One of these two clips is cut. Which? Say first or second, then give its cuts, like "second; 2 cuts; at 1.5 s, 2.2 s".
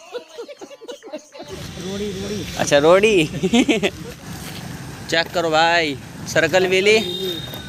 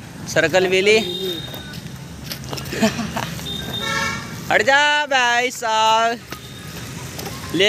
first; 2 cuts; at 1.6 s, 4.1 s